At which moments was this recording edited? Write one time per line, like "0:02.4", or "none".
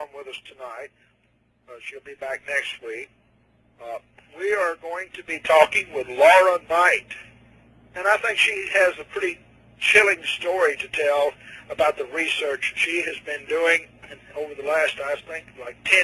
0:06.7